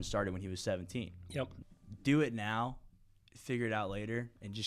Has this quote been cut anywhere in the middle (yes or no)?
yes